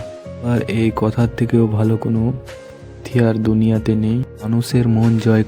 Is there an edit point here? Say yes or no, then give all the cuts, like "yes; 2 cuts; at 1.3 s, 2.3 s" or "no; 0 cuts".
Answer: no; 0 cuts